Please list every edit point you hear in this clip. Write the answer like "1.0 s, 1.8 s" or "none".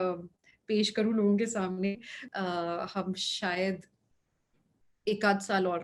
2.2 s

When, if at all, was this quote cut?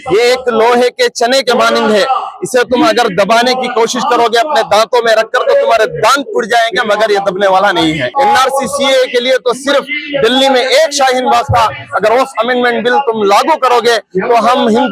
8.1 s

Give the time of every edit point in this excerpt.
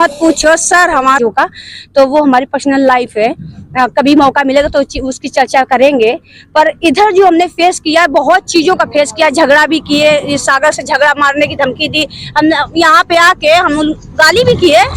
1.2 s

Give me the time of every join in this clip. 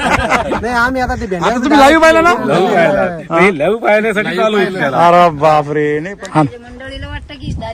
6.1 s

